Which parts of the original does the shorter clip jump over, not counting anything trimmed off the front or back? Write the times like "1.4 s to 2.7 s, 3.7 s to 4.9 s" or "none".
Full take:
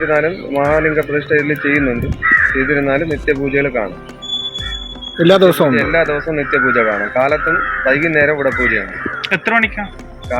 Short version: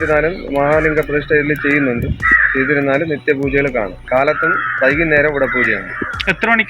4.0 s to 7.1 s